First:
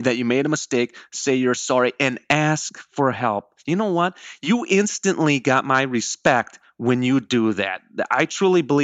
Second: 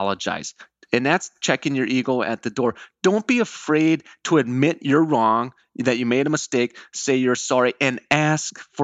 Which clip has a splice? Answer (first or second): second